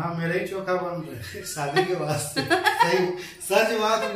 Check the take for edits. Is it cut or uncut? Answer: uncut